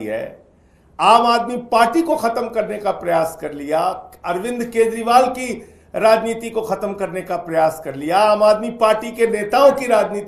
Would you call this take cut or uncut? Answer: uncut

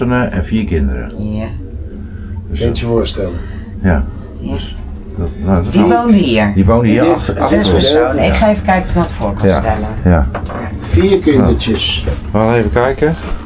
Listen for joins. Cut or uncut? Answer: uncut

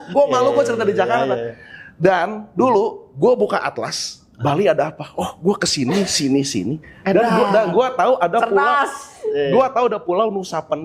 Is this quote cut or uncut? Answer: uncut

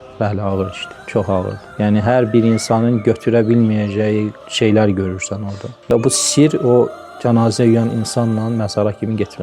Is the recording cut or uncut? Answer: cut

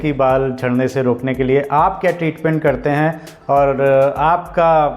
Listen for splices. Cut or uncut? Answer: uncut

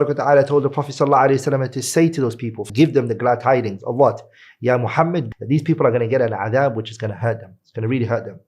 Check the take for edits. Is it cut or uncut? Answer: cut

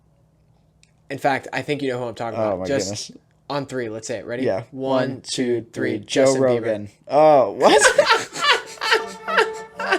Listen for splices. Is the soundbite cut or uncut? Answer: uncut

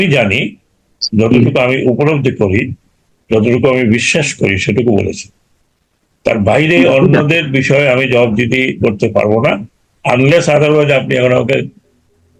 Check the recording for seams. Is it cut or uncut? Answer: uncut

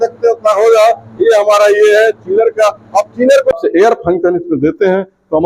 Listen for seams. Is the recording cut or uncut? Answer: cut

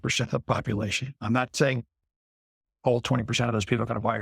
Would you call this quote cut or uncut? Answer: cut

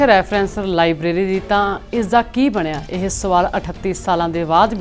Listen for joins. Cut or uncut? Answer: uncut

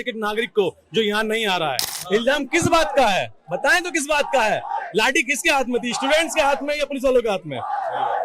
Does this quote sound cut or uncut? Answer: cut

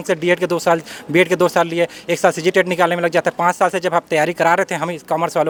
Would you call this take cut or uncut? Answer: uncut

